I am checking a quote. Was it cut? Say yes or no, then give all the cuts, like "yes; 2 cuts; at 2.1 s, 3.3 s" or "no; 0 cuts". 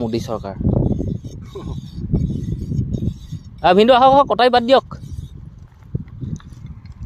no; 0 cuts